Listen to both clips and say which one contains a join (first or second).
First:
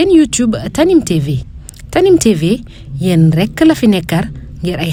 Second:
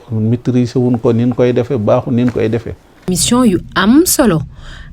second